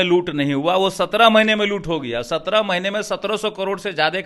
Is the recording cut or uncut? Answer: uncut